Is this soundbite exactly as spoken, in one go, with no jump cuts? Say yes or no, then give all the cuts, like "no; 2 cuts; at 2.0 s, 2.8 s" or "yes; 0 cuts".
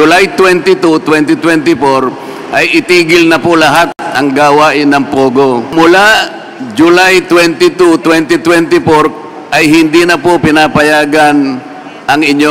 no; 1 cut; at 5.7 s